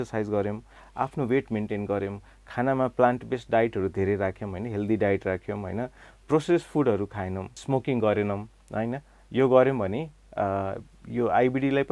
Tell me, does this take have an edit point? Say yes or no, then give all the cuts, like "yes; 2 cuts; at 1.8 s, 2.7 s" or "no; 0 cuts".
yes; 1 cut; at 7.6 s